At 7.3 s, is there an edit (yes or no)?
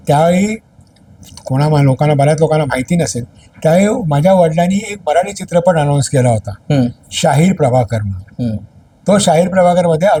no